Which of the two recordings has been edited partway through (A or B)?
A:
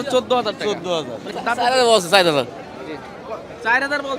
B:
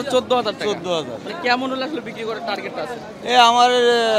A